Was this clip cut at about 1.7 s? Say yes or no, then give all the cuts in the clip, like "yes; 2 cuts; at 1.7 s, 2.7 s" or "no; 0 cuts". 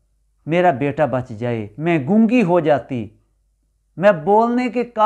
yes; 1 cut; at 1.7 s